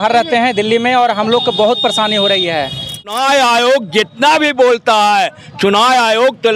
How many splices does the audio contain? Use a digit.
1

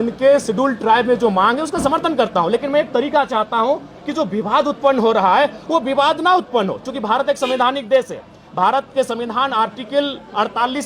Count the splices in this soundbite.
0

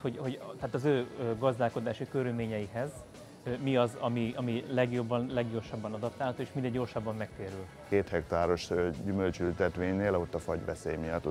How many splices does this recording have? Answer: 1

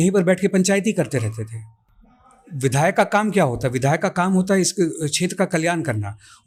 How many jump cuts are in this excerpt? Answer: 0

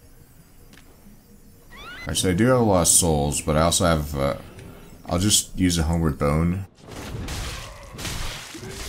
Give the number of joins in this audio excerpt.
2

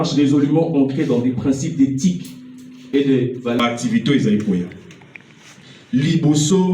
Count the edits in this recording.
1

